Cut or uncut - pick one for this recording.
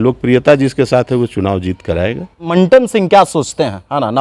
cut